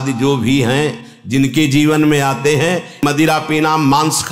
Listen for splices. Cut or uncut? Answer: uncut